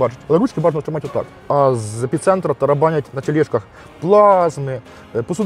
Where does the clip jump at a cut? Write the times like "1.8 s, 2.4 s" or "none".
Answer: 1.3 s

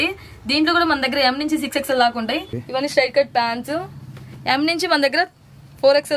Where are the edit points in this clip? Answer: 2.6 s

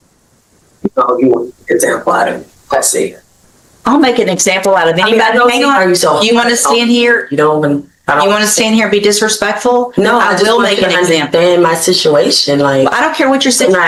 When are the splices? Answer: none

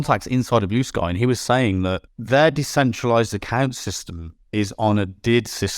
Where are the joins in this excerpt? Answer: 2.1 s

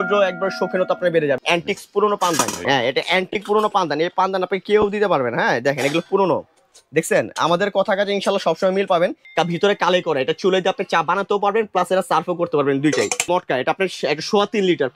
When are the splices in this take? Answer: 1.4 s, 2.6 s, 9.2 s, 13.2 s

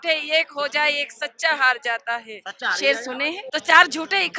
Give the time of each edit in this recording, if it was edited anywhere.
3.4 s

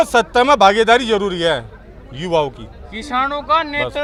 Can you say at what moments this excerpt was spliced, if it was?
none

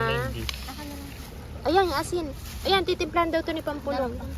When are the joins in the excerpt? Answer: none

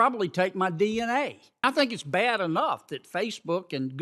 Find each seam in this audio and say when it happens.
1.6 s

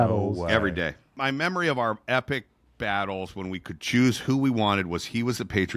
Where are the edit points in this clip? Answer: 1.1 s

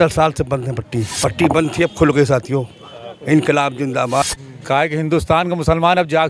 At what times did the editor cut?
1.1 s, 4.4 s

